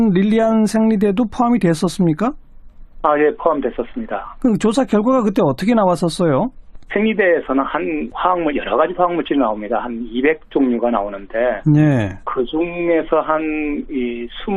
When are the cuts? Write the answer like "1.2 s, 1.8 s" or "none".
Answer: 10.3 s